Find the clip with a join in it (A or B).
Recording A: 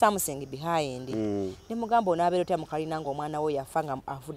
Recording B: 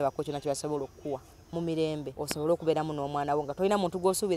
B